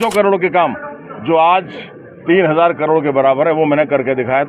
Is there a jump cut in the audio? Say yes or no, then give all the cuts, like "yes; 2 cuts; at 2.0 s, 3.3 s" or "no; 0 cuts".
no; 0 cuts